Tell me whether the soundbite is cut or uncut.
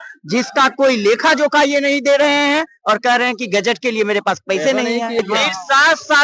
cut